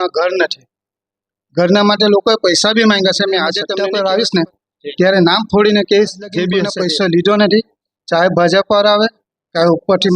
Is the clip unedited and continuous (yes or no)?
no